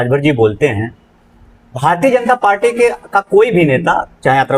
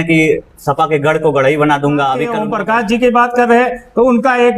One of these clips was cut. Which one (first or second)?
second